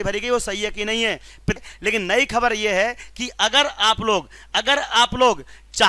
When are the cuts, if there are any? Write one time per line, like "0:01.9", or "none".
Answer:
0:01.6

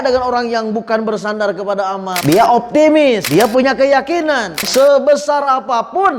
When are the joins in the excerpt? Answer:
0:02.1
0:03.2
0:04.6

